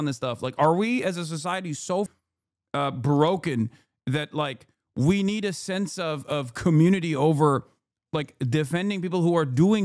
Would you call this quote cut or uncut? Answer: cut